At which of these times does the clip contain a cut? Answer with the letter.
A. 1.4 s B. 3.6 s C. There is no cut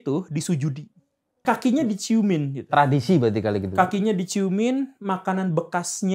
A